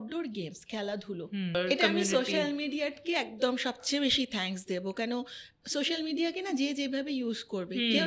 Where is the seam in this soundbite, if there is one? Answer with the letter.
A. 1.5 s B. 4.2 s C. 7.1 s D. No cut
A